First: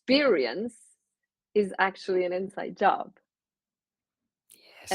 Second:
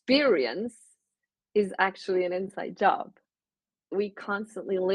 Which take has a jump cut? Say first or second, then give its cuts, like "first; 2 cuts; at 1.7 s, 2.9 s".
second; 1 cut; at 3.9 s